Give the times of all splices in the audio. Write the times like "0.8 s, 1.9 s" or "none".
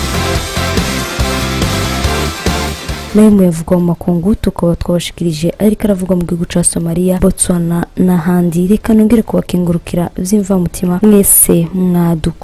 none

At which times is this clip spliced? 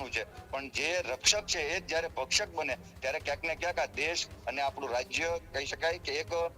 none

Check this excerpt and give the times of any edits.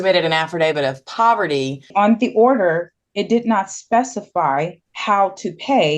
1.9 s, 4.9 s

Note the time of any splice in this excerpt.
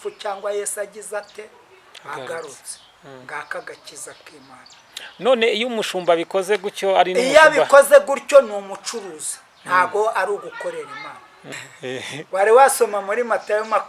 none

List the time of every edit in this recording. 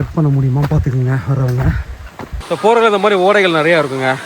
2.3 s

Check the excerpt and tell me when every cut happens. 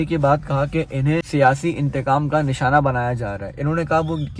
1.3 s

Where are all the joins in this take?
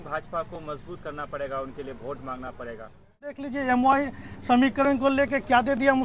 3.5 s

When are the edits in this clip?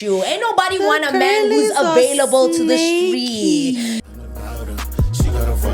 4.0 s

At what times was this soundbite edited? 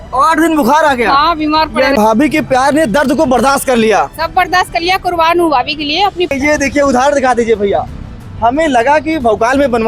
2.0 s, 6.3 s

